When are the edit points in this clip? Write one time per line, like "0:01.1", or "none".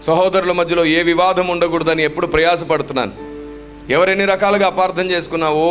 none